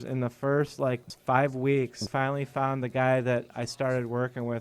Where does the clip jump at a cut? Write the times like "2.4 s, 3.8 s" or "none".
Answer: 1.1 s, 2.0 s